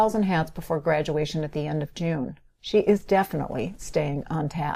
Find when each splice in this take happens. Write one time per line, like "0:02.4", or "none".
none

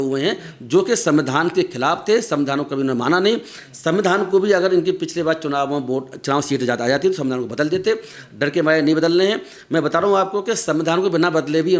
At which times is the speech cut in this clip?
none

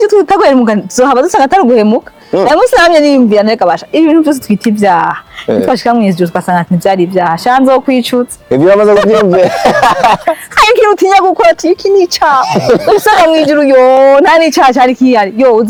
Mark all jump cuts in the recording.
none

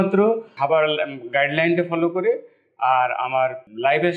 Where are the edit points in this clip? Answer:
none

